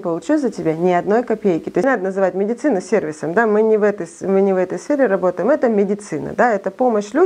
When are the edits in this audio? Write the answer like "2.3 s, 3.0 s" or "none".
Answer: 1.8 s